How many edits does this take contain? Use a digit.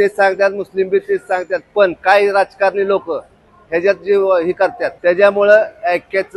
1